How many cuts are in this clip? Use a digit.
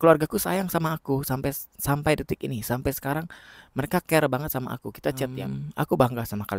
1